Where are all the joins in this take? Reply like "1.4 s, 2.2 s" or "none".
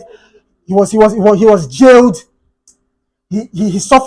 none